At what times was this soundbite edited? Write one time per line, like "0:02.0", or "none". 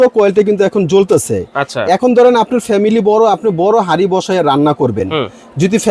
none